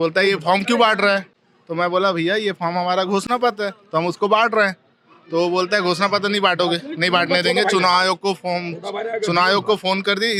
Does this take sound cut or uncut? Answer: uncut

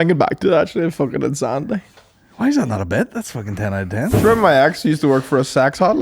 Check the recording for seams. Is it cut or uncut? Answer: cut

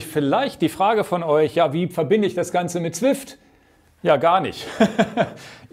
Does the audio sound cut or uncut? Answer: uncut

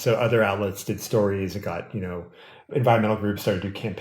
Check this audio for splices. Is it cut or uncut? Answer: cut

